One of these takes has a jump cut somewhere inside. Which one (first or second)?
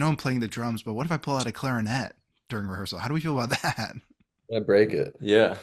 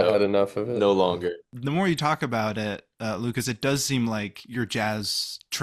second